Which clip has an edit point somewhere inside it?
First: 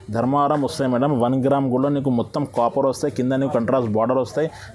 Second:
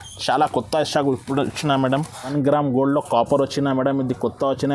second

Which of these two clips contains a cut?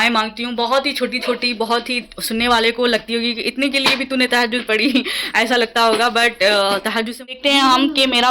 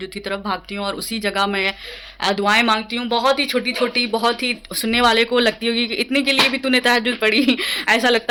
first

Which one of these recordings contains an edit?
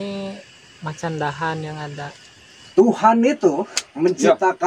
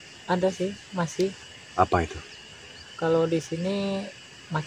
first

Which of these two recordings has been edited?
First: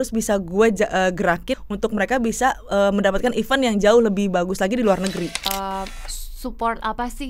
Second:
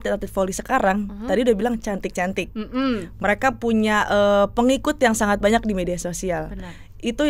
first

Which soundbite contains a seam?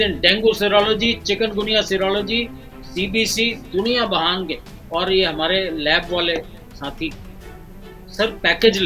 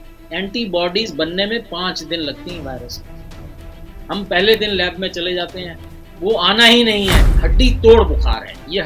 second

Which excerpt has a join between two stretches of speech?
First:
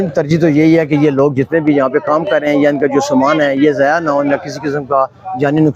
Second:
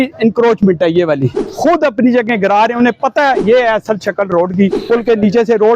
second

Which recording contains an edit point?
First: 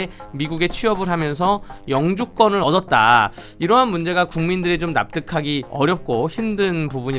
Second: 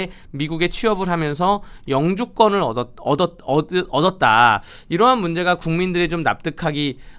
first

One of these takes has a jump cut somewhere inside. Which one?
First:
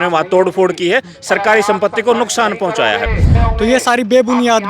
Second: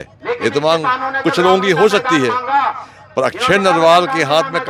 first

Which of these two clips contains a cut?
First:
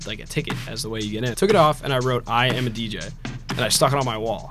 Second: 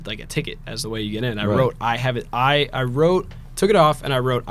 first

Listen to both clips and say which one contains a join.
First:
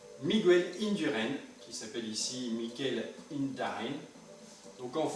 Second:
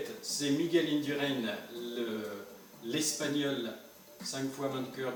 first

